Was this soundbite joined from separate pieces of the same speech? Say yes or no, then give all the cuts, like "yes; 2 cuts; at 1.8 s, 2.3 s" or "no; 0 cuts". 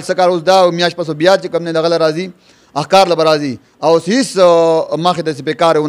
no; 0 cuts